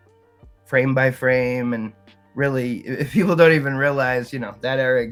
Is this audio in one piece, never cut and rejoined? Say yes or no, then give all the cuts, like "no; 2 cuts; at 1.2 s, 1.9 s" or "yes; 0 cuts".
yes; 0 cuts